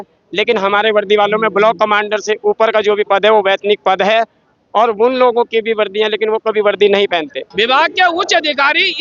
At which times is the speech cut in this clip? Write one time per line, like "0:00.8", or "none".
0:07.5

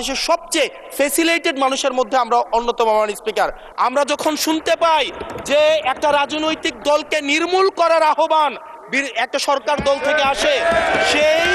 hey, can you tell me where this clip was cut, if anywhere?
0:03.6

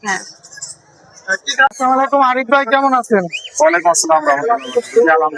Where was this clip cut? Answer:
0:01.7

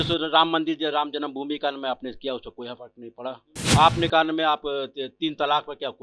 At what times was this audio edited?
0:03.5

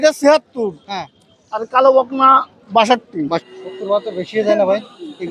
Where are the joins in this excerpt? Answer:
0:03.4

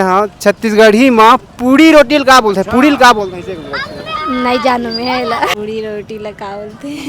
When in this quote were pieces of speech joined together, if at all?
0:05.6

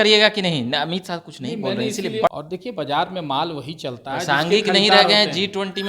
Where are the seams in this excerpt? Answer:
0:02.3

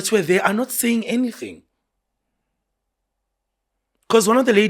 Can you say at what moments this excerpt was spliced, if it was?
none

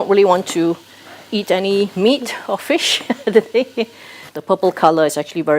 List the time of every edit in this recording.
0:04.3

